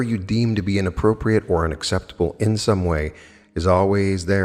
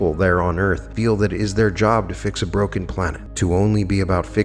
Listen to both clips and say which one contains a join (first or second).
second